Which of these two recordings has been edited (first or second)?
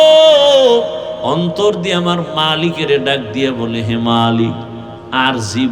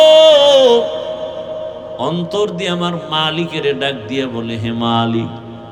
first